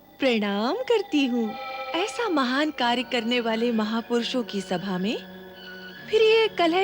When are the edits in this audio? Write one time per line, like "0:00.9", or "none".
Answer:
0:01.8